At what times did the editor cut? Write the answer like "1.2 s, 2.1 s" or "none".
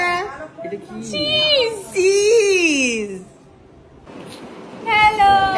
4.1 s